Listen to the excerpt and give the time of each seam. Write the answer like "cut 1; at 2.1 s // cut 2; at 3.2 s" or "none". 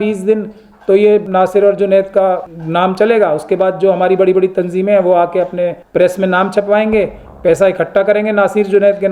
cut 1; at 1.2 s // cut 2; at 2.5 s // cut 3; at 5.8 s